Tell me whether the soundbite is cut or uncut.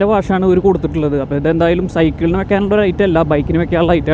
uncut